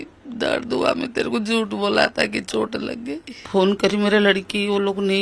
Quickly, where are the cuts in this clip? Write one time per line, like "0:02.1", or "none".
0:03.4